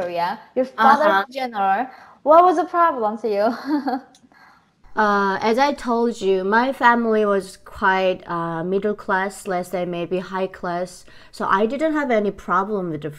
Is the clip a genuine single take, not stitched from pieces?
yes; 0 cuts

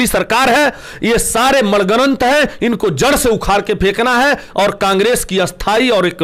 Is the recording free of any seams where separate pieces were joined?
yes; 0 cuts

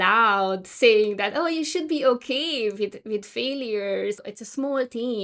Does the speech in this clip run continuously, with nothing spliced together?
no; 1 cut; at 4.2 s

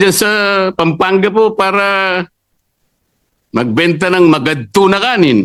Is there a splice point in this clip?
no; 0 cuts

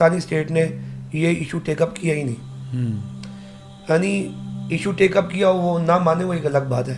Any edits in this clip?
no; 0 cuts

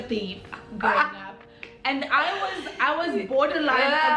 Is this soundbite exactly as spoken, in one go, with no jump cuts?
yes; 0 cuts

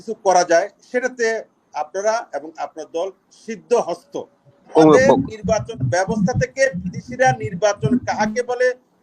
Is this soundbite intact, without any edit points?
no; 1 cut; at 4.7 s

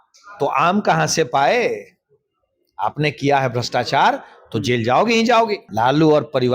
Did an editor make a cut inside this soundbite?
yes; 1 cut; at 5.6 s

